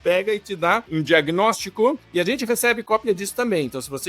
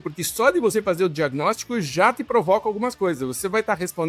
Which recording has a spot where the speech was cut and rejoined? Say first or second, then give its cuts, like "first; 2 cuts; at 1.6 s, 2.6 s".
first; 2 cuts; at 0.9 s, 2.0 s